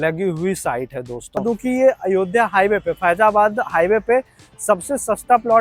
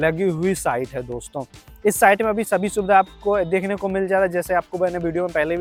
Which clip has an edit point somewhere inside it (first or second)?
first